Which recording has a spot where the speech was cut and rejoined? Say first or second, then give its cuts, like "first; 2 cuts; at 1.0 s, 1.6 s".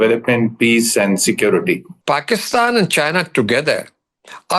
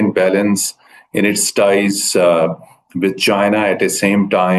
first; 1 cut; at 1.9 s